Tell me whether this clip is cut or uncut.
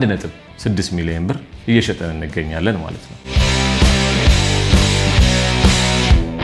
uncut